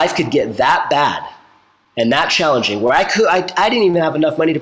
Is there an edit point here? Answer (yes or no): no